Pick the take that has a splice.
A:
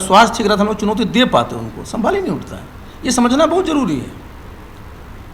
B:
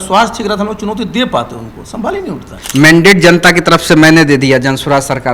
B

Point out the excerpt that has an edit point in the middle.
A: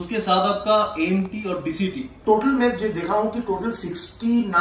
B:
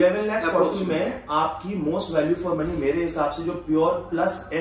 A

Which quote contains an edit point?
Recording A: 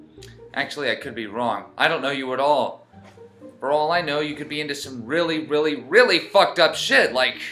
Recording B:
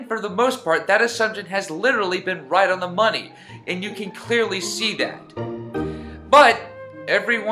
B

